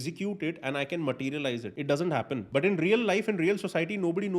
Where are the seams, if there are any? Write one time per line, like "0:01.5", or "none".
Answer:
0:01.7
0:02.5